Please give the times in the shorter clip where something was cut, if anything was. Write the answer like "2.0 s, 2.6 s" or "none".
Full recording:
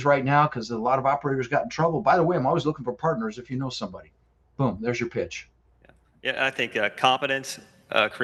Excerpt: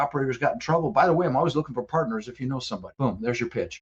2.9 s